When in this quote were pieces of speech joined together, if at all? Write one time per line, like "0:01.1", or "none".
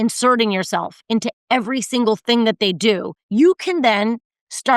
0:03.1